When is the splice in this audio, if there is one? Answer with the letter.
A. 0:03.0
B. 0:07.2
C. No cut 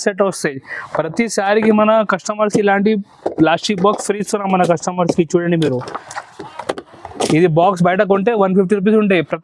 C